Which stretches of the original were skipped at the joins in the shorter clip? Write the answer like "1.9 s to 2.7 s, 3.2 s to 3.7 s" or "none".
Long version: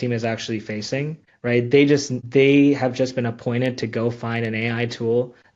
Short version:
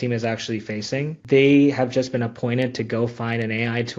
1.1 s to 2.2 s